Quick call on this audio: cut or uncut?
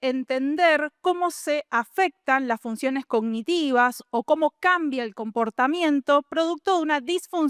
uncut